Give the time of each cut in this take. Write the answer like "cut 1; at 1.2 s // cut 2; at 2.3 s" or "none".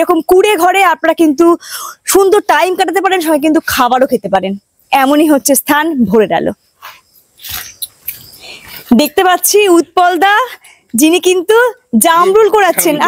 none